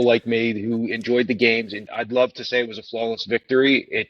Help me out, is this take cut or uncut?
cut